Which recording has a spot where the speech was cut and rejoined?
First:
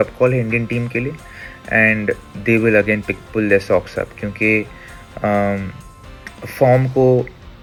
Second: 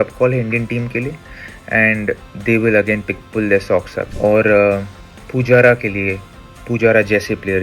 second; 1 cut; at 4.0 s

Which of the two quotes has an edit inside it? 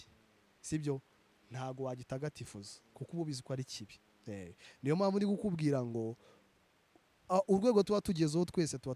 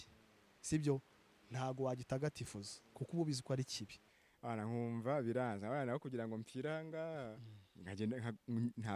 second; 1 cut; at 4.1 s

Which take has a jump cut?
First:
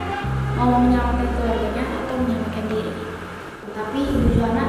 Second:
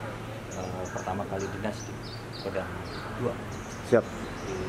first; 1 cut; at 3.7 s

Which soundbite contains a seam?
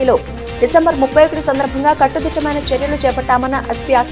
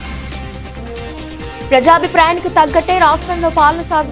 second; 1 cut; at 1.7 s

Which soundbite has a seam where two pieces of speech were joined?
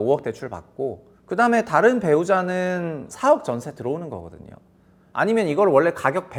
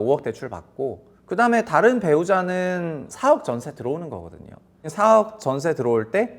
second; 1 cut; at 4.9 s

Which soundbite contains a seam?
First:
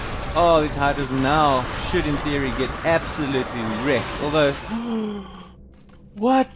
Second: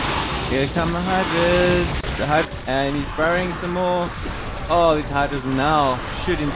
second; 1 cut; at 2.5 s

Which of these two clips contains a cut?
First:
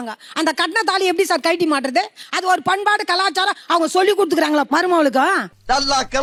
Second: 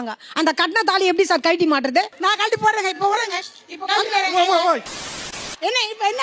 second; 2 cuts; at 2.1 s, 5.3 s

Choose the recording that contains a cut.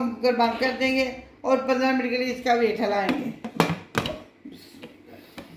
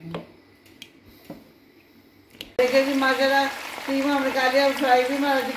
second; 1 cut; at 2.4 s

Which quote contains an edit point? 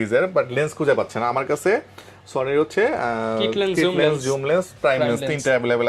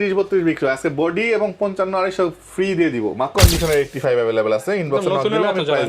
second; 1 cut; at 3.3 s

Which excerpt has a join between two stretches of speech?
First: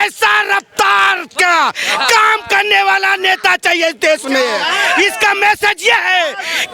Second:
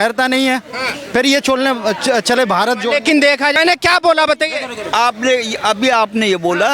second; 1 cut; at 3.6 s

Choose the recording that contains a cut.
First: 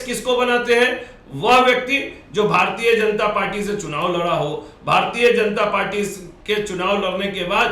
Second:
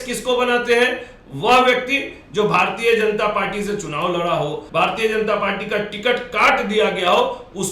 second; 1 cut; at 4.6 s

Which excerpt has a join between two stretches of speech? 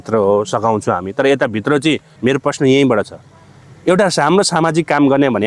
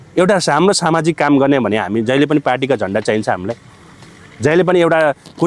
first; 1 cut; at 2.1 s

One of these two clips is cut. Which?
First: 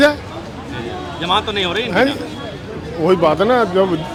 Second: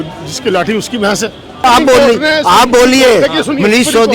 second; 1 cut; at 1.6 s

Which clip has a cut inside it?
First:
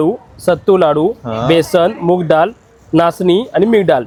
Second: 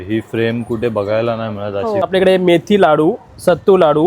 second; 1 cut; at 2.1 s

